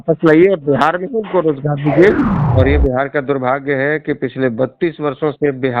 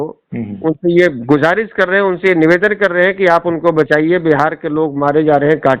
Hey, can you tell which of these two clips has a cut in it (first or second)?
first